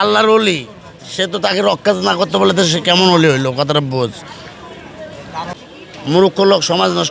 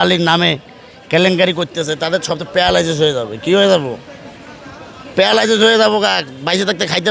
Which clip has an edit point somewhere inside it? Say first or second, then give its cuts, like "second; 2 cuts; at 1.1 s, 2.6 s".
first; 1 cut; at 5.3 s